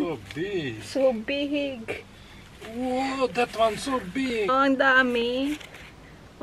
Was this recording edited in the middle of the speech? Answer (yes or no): yes